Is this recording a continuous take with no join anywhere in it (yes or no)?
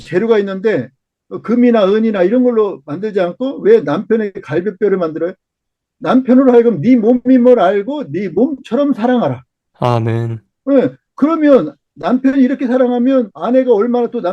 no